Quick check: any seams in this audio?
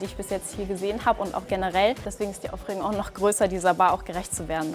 yes; 1 cut; at 2.1 s

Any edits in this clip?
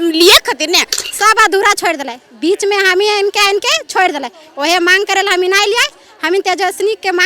yes; 1 cut; at 1.0 s

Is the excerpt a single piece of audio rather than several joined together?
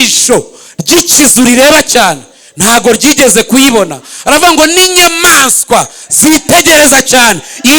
yes; 0 cuts

